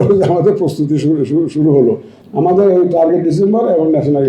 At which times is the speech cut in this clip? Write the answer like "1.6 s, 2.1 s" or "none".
2.1 s